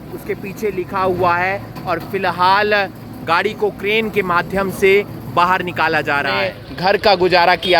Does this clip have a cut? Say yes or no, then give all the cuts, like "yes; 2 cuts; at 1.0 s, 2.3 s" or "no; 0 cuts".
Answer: yes; 1 cut; at 6.6 s